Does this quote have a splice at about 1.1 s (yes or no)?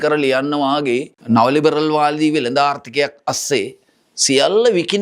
yes